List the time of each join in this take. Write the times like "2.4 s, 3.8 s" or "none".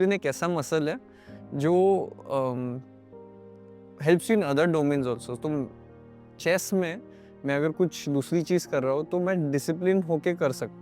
none

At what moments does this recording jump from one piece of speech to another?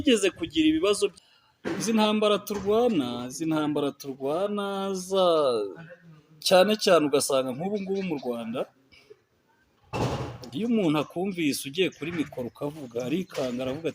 1.2 s

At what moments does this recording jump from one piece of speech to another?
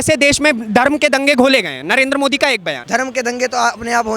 2.7 s

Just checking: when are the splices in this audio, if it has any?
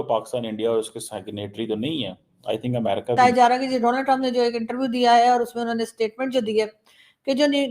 3.1 s

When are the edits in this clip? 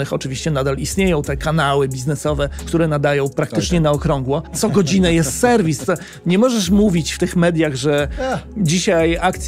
2.6 s, 4.6 s

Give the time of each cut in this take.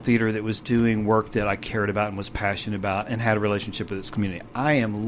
none

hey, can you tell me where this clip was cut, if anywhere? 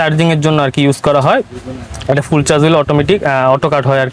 none

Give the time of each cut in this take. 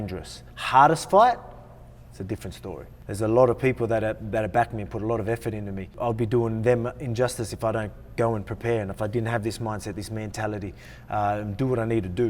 2.9 s, 5.9 s

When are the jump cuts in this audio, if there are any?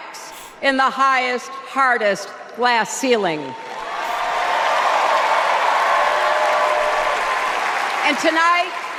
none

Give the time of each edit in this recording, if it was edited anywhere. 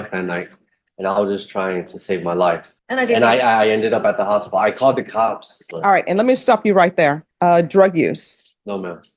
2.7 s, 5.5 s, 7.3 s

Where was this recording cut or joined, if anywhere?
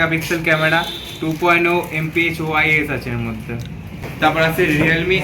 4.0 s

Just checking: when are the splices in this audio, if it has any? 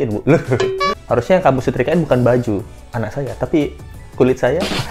0.9 s

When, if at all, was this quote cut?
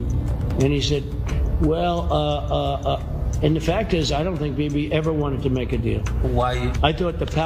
none

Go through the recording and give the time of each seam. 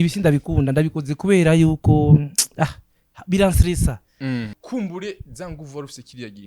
4.6 s

